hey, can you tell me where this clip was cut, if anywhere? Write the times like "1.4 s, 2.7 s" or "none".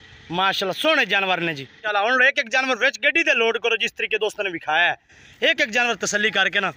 1.8 s